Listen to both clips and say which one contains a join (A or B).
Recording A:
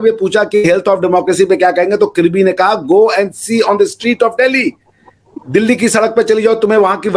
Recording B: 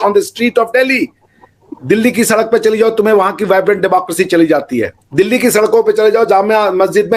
B